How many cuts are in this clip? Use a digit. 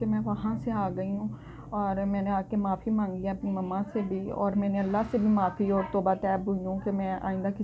0